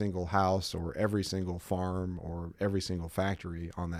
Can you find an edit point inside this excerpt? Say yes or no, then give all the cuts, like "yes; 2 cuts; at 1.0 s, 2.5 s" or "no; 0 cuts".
no; 0 cuts